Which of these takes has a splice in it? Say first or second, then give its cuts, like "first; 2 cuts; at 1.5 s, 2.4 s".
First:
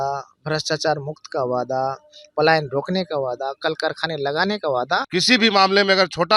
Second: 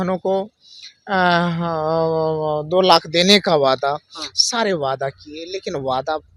first; 1 cut; at 5.0 s